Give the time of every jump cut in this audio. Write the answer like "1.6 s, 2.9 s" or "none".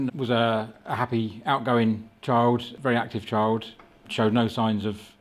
2.7 s, 4.1 s